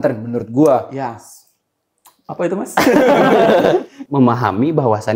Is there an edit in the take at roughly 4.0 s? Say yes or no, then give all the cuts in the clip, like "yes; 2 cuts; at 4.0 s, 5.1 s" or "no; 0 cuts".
yes; 1 cut; at 4.0 s